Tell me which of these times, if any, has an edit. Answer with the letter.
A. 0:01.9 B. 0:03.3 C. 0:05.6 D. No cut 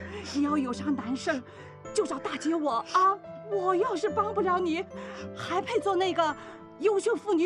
B